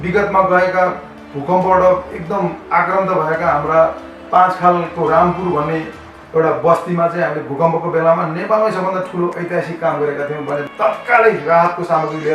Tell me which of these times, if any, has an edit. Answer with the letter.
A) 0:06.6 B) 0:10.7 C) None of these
B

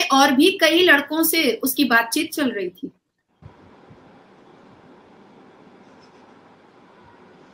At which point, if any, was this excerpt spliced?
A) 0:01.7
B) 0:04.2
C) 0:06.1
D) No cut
D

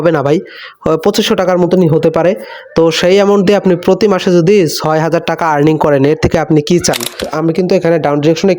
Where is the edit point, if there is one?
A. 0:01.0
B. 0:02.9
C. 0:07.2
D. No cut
C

